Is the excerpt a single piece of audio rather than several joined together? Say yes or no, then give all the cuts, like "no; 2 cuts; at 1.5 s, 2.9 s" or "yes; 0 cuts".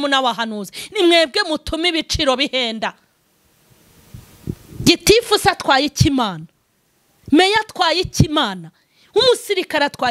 yes; 0 cuts